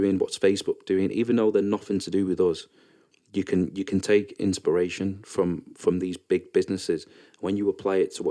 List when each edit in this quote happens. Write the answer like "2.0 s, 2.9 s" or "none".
none